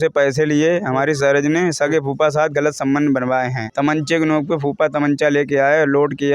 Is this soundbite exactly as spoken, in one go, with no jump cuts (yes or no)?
yes